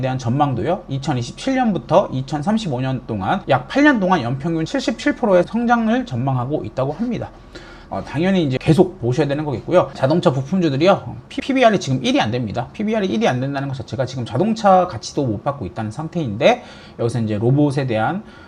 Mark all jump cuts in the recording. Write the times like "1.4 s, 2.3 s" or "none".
7.7 s, 9.9 s